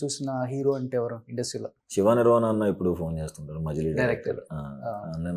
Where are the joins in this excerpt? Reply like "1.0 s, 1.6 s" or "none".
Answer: 1.8 s